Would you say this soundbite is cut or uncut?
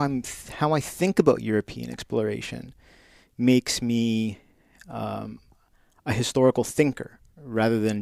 uncut